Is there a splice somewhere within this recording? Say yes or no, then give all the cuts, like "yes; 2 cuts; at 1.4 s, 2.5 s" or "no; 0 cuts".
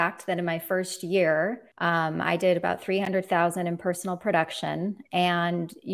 yes; 1 cut; at 1.7 s